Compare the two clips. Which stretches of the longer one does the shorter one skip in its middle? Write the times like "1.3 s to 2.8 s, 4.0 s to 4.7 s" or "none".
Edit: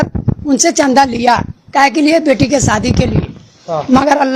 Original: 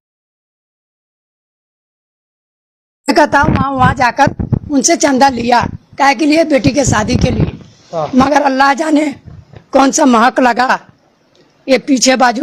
none